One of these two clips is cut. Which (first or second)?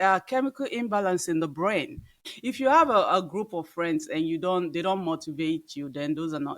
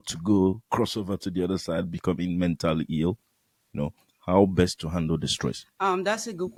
first